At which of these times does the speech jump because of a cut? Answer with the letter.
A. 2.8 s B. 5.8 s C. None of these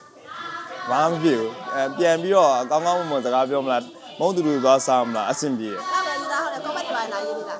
B